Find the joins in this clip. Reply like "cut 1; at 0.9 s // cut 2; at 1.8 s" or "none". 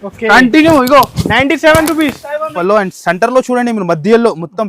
cut 1; at 2.5 s